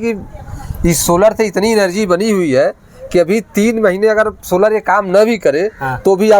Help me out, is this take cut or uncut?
uncut